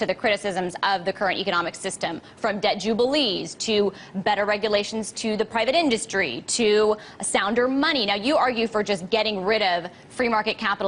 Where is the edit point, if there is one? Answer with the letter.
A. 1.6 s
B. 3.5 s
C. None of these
B